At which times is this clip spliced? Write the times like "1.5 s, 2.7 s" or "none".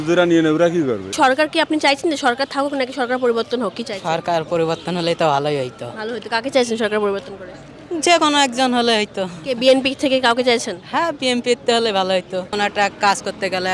1.1 s, 12.5 s